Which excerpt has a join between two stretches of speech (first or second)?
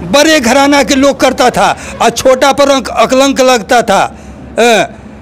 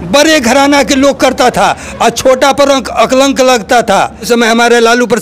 second